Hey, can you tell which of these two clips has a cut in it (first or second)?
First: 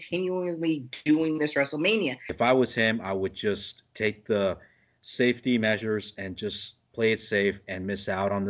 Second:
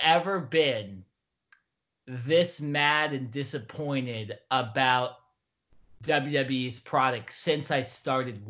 first